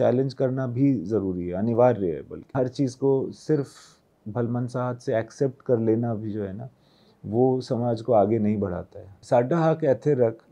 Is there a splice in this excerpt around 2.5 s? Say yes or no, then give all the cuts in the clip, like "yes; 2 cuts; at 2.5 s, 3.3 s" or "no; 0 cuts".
yes; 2 cuts; at 2.5 s, 9.2 s